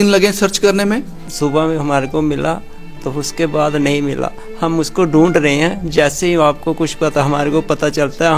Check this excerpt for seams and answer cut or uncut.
cut